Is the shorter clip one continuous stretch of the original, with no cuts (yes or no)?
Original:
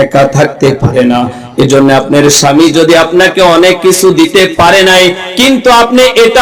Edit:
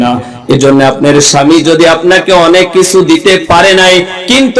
yes